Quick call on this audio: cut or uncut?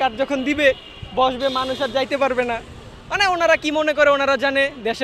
uncut